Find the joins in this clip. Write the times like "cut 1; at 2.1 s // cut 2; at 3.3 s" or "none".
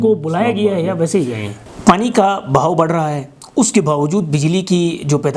cut 1; at 1.5 s